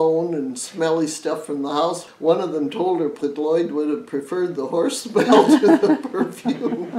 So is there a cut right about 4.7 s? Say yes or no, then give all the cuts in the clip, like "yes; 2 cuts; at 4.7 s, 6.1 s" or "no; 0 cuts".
no; 2 cuts; at 2.0 s, 3.2 s